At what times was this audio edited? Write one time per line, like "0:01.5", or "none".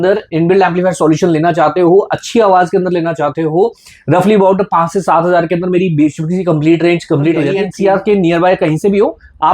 0:07.6